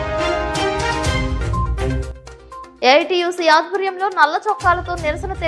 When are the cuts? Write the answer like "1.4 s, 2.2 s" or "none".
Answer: none